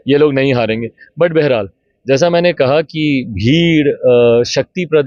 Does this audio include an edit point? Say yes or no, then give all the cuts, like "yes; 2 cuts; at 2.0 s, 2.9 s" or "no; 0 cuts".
no; 0 cuts